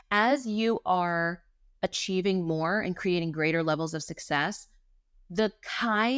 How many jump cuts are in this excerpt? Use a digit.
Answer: 0